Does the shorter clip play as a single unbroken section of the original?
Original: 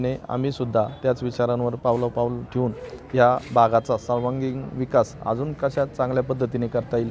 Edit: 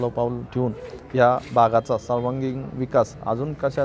yes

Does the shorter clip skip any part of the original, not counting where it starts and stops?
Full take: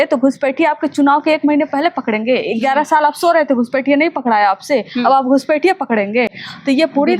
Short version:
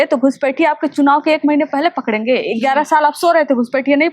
no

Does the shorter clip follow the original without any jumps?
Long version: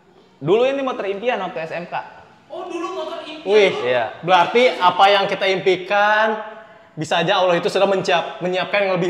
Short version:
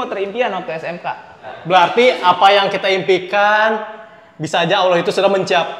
no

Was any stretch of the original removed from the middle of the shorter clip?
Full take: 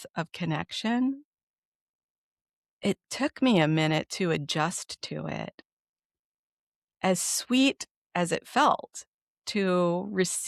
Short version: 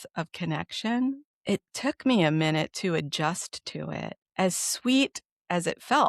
yes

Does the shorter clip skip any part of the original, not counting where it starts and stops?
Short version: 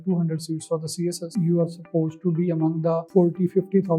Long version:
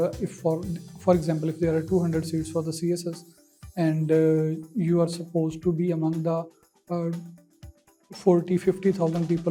yes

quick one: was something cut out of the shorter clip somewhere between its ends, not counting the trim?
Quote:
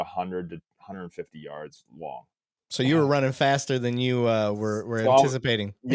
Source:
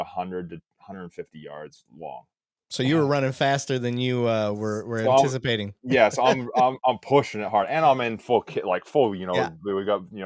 no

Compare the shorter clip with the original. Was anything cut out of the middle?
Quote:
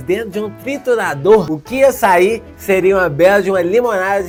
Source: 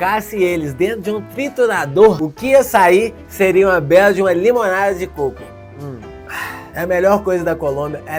no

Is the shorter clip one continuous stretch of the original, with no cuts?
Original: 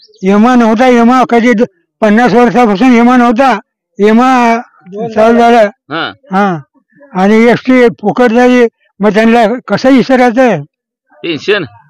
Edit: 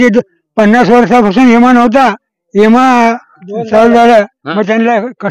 no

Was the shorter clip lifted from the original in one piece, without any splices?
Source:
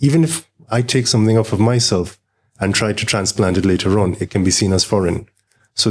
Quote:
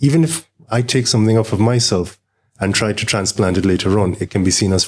yes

